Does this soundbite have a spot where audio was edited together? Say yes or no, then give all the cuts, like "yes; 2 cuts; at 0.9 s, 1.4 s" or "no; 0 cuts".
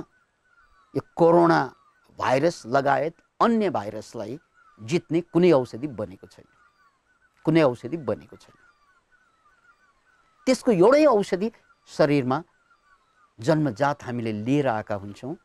no; 0 cuts